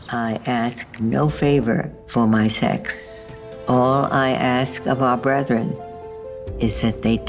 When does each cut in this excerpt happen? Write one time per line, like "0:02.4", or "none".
none